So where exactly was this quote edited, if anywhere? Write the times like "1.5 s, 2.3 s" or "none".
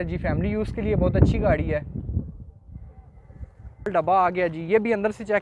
3.9 s

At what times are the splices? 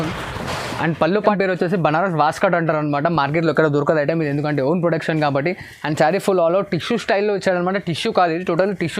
1.2 s

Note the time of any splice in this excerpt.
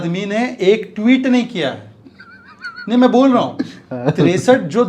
none

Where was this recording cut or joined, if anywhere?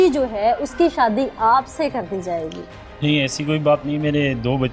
none

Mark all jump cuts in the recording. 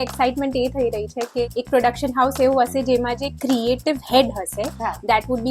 none

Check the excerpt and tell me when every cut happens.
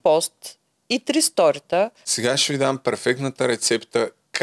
2.0 s

